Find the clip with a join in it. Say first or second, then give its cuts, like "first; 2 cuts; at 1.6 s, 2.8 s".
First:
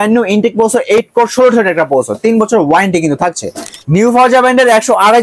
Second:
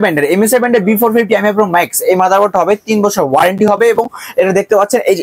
first; 1 cut; at 3.7 s